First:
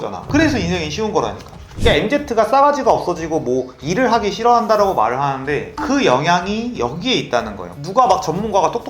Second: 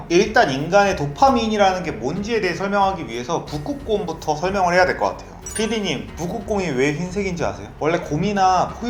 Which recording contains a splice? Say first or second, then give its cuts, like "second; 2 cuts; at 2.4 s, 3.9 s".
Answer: first; 2 cuts; at 1.6 s, 7.7 s